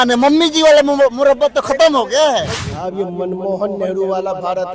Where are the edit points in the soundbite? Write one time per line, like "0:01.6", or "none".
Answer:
0:02.6